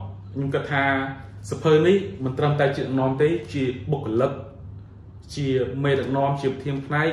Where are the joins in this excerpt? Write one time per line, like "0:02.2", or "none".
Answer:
none